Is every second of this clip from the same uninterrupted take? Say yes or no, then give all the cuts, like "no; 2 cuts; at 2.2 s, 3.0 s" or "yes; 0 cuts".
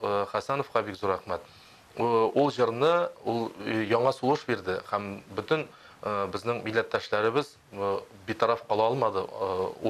yes; 0 cuts